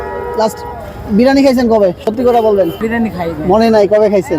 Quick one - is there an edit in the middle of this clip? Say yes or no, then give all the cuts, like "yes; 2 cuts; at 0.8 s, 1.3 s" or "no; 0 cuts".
yes; 1 cut; at 2.8 s